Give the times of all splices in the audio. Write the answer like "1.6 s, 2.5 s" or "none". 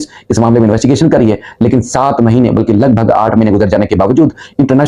none